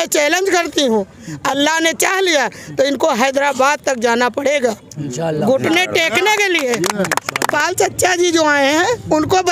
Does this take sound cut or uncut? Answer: cut